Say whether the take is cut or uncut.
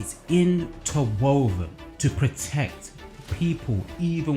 cut